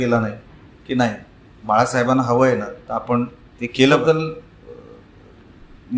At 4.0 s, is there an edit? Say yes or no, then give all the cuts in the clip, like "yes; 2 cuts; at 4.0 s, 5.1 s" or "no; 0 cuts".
yes; 1 cut; at 4.0 s